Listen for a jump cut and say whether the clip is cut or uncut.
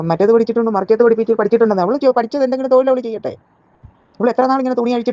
uncut